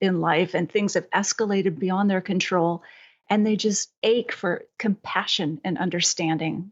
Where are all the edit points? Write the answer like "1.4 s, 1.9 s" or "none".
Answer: 3.9 s, 4.7 s